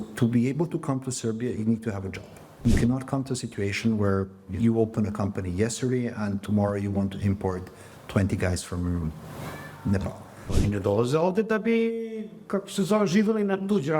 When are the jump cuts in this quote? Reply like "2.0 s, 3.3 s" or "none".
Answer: 2.6 s, 10.5 s